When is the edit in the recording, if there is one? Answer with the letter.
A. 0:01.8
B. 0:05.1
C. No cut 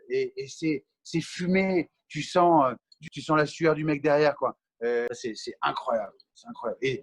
B